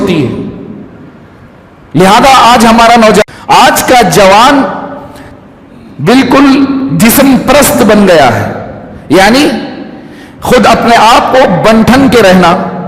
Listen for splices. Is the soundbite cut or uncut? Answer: cut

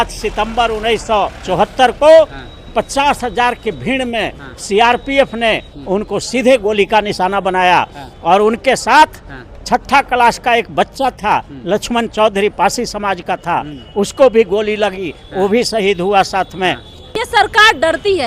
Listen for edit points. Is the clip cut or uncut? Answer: cut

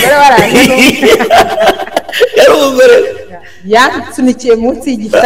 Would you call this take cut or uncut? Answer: uncut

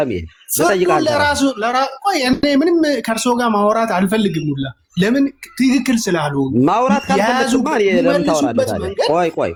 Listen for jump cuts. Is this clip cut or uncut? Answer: uncut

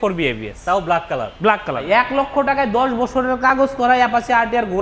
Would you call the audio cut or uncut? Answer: cut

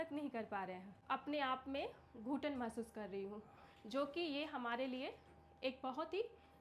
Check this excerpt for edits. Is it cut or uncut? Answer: cut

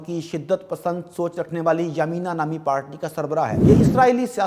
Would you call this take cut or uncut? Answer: cut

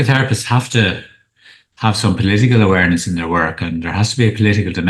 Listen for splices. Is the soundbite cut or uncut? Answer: uncut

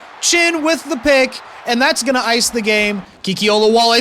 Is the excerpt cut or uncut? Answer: cut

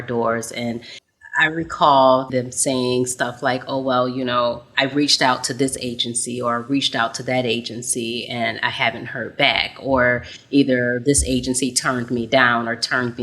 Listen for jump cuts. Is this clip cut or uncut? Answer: cut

